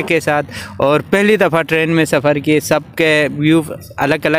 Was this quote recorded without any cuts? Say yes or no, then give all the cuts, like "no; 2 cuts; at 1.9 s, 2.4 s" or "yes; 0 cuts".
yes; 0 cuts